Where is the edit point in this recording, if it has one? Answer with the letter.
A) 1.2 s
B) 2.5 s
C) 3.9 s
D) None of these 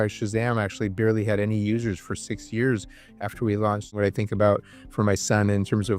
C